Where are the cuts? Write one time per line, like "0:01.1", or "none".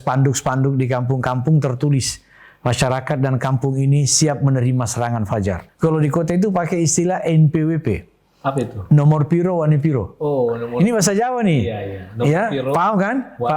0:05.7